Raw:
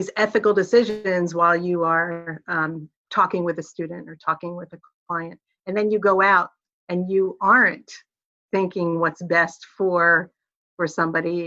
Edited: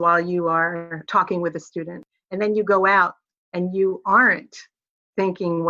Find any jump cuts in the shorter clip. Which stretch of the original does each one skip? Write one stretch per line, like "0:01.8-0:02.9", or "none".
0:02.3-0:03.0
0:04.1-0:05.4